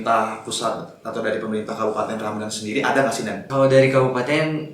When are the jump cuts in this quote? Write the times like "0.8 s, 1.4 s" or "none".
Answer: 3.4 s

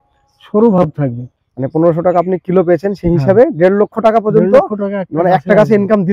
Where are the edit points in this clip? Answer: 1.5 s

